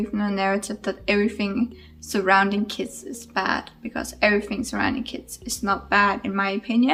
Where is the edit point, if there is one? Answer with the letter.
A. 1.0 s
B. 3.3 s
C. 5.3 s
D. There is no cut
D